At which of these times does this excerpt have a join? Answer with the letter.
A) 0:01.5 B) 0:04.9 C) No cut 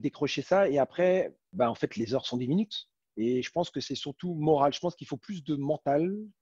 A